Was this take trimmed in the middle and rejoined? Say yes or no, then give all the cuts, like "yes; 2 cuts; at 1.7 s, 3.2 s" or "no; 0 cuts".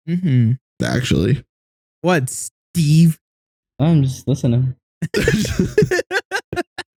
no; 0 cuts